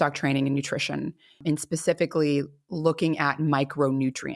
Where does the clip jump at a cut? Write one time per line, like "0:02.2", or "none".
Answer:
0:01.4